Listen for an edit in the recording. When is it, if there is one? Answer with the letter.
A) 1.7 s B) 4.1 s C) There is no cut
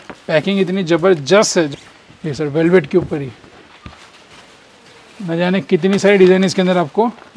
A